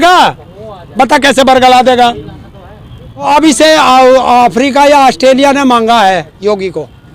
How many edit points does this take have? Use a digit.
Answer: 1